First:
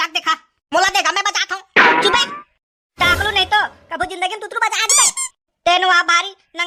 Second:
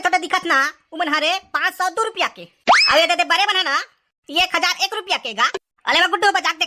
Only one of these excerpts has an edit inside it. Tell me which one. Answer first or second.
second